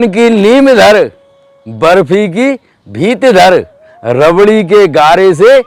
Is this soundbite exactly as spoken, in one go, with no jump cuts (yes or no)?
yes